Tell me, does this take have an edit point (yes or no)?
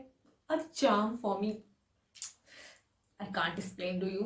no